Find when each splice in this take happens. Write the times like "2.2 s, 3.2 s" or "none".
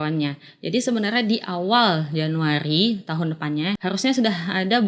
3.8 s